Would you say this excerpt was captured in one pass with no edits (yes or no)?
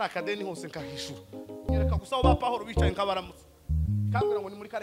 no